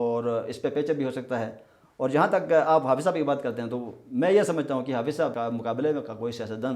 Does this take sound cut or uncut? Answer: cut